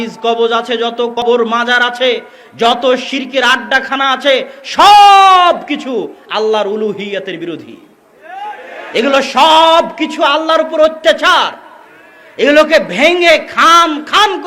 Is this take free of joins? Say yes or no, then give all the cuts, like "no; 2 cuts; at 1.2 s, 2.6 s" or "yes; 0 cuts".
no; 1 cut; at 1.2 s